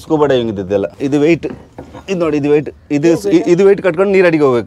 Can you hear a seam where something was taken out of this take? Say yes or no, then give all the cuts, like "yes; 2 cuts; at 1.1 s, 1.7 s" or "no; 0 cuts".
yes; 1 cut; at 0.9 s